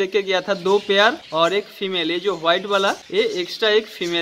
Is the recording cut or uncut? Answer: cut